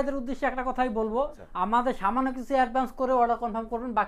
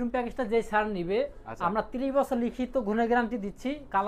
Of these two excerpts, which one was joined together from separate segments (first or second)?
first